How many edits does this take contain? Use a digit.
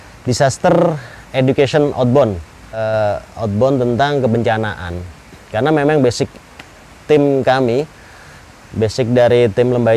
1